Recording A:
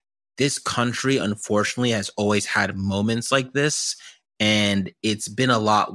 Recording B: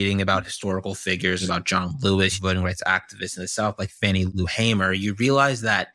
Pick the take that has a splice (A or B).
B